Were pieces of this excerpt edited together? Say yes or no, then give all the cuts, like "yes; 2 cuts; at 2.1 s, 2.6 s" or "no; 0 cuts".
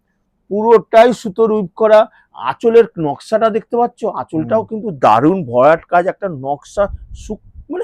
no; 0 cuts